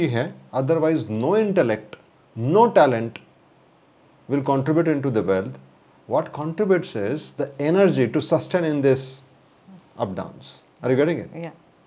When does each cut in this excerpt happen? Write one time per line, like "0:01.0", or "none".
none